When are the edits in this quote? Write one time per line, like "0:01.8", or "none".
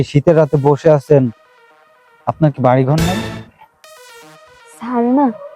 0:03.2